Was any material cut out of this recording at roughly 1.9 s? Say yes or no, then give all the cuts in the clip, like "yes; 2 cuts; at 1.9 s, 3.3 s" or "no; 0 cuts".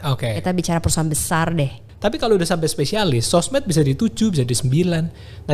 yes; 1 cut; at 1.9 s